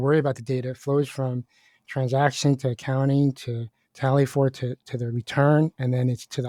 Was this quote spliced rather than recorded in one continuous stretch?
no; 0 cuts

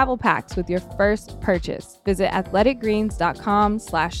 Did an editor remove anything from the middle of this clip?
yes; 1 cut; at 2.0 s

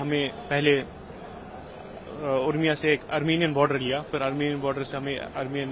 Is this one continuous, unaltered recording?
yes; 0 cuts

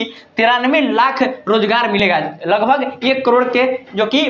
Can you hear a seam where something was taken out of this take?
no; 0 cuts

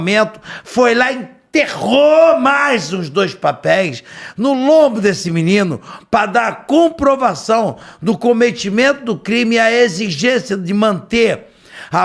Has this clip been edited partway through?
no; 0 cuts

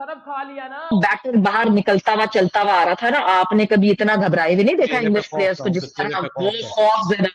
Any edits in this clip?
yes; 1 cut; at 0.9 s

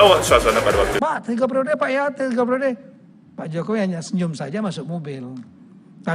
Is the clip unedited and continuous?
no; 1 cut; at 0.9 s

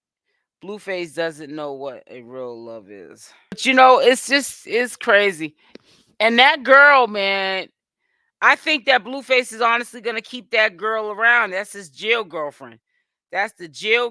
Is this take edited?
yes; 1 cut; at 3.6 s

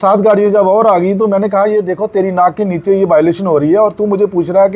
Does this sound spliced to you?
no; 0 cuts

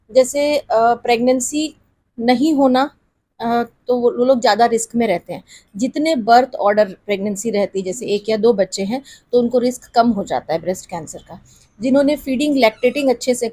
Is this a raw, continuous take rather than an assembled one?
yes; 0 cuts

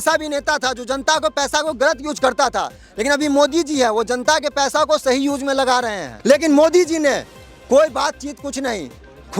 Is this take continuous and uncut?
no; 1 cut; at 6.1 s

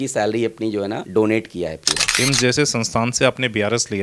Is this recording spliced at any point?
yes; 1 cut; at 2.1 s

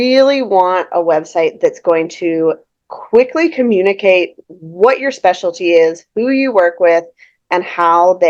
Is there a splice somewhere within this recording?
no; 0 cuts

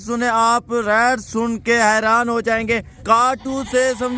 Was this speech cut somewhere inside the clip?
yes; 1 cut; at 2.9 s

